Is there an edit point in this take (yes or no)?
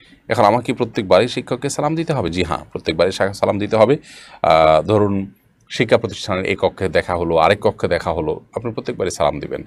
no